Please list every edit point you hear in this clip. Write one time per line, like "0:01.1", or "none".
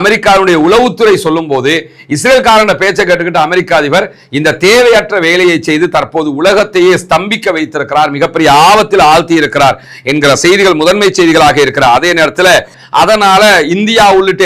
0:12.7